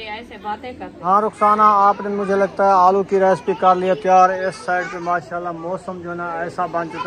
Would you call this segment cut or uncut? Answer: cut